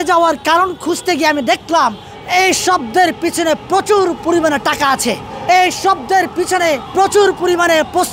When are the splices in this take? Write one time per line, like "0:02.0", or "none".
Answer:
0:02.1
0:05.3
0:06.9